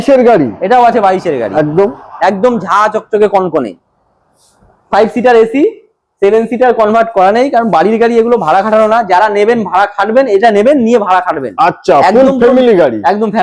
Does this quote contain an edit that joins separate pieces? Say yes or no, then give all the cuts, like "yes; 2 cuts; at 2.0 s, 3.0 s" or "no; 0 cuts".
no; 0 cuts